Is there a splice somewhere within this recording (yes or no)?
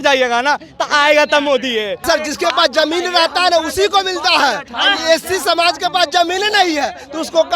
yes